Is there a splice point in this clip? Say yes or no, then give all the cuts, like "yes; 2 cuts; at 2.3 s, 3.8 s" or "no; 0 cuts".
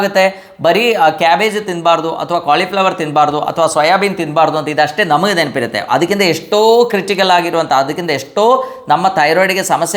no; 0 cuts